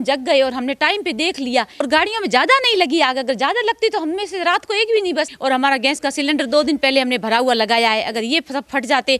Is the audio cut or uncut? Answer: cut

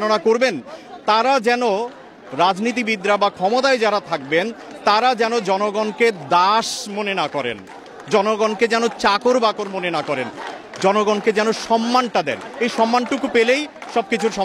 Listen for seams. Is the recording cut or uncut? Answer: uncut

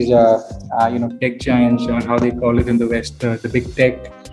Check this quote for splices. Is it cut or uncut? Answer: uncut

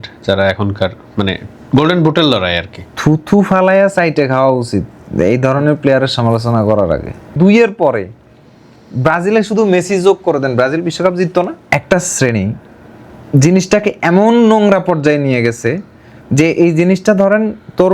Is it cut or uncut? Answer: cut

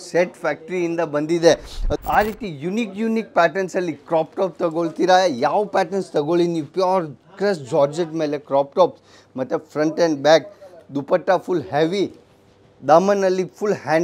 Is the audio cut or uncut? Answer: cut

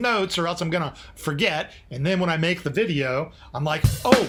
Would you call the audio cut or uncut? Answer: uncut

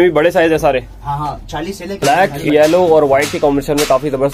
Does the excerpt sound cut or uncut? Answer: cut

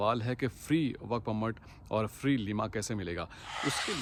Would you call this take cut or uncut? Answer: uncut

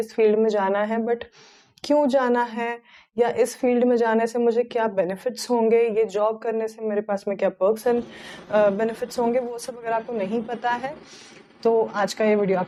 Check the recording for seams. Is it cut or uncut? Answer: uncut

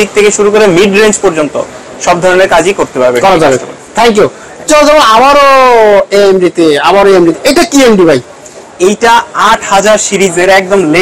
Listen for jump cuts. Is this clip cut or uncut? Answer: uncut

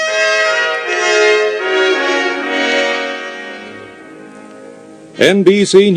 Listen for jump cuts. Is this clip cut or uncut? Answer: uncut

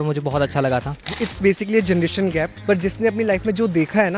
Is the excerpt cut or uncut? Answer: cut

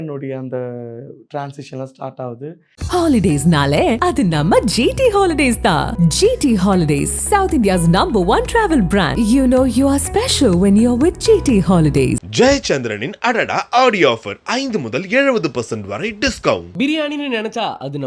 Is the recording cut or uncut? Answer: cut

